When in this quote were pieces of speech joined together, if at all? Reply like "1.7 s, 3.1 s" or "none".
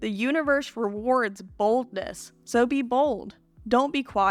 none